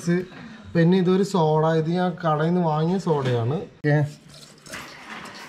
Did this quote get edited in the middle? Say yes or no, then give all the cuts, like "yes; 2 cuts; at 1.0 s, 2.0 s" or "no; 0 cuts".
yes; 1 cut; at 3.7 s